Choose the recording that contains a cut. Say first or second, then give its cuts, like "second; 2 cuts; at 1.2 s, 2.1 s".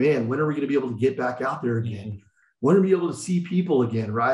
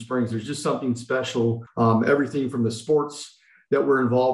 second; 1 cut; at 1.6 s